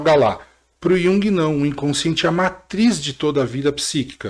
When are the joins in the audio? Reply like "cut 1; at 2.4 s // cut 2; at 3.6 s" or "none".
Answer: none